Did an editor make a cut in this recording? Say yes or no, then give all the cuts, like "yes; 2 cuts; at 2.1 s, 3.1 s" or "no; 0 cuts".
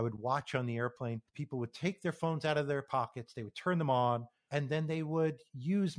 yes; 2 cuts; at 1.3 s, 4.4 s